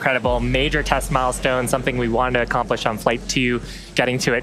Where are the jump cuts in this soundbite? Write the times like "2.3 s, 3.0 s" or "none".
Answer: none